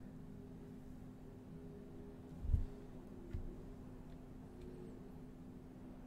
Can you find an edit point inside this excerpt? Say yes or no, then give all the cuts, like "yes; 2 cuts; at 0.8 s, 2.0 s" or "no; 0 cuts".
no; 0 cuts